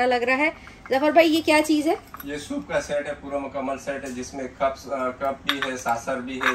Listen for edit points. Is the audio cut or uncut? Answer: uncut